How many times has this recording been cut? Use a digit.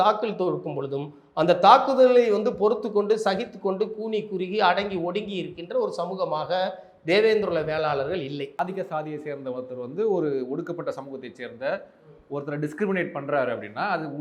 1